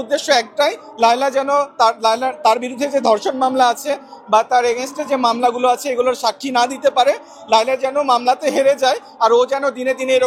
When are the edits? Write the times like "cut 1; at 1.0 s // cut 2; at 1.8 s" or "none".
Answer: none